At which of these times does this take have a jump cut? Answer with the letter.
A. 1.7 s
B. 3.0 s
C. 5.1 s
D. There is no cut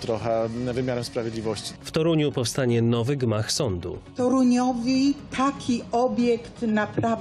A